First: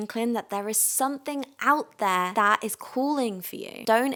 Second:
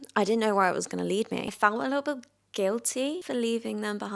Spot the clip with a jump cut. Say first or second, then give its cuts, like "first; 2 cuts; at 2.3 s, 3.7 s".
second; 2 cuts; at 1.5 s, 3.2 s